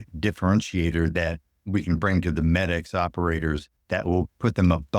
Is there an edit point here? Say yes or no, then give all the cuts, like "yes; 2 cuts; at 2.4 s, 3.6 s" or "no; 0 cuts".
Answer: yes; 1 cut; at 3.7 s